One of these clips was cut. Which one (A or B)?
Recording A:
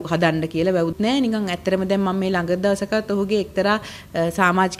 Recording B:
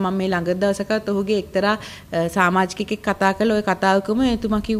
A